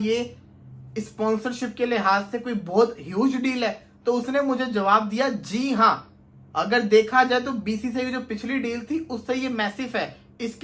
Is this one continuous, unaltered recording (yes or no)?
yes